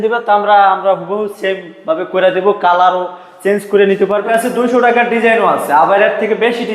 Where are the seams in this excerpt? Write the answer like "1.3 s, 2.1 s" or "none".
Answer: 4.2 s